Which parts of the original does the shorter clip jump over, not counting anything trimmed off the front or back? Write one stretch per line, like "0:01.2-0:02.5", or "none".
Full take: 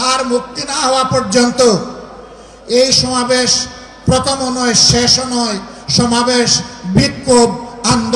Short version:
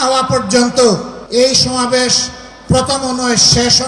0:02.0-0:02.5